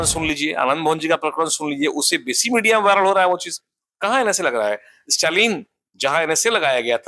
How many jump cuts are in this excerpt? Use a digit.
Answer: 0